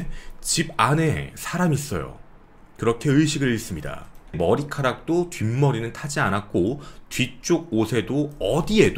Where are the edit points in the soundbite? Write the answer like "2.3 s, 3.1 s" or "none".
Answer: 4.4 s